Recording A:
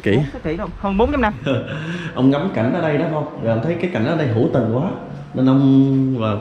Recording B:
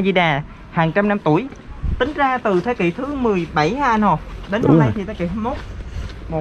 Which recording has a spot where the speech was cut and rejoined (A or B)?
A